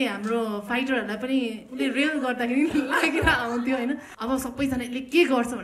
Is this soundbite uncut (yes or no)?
no